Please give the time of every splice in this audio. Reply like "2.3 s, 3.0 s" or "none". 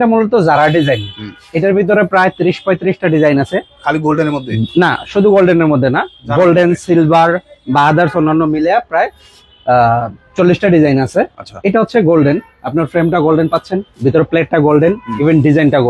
none